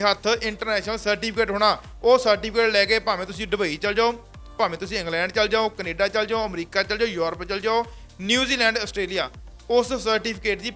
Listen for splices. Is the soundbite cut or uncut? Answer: uncut